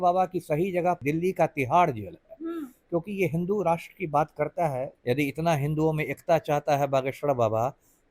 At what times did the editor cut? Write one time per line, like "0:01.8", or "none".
0:01.0
0:04.9